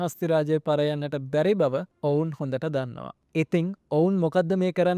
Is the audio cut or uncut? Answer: uncut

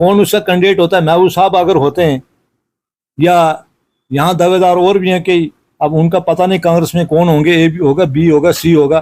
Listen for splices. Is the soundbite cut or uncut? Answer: uncut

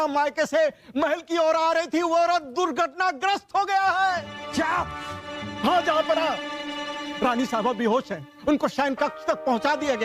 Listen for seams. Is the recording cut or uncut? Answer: uncut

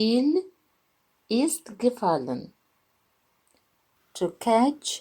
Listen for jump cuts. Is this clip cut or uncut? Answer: cut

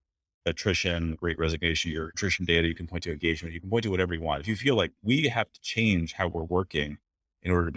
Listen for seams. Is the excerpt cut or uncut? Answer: cut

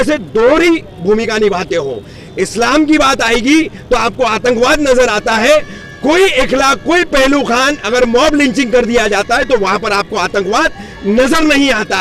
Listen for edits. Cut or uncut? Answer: uncut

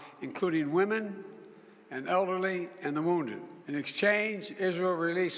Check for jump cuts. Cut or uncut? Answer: cut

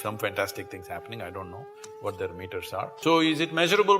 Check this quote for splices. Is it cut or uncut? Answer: cut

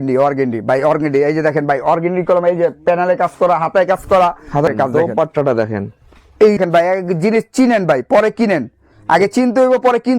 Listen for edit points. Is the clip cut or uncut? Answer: cut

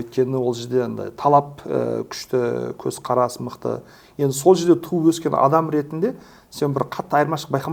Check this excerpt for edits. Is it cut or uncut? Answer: uncut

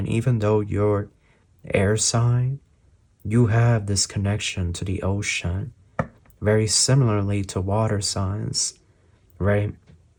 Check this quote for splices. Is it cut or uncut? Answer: uncut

